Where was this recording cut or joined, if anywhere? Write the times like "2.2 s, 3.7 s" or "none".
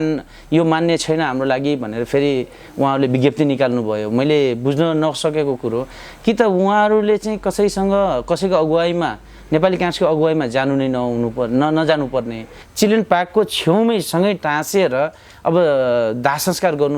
12.6 s